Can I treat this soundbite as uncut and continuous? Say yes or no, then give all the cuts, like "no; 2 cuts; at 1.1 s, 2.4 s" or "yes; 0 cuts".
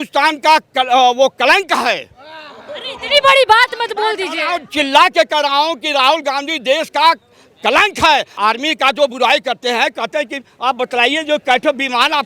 no; 1 cut; at 8.3 s